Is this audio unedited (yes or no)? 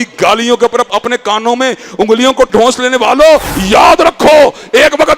no